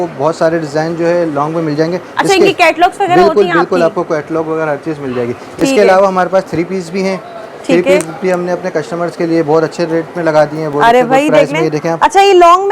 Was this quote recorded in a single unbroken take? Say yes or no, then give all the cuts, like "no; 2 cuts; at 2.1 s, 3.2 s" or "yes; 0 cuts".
yes; 0 cuts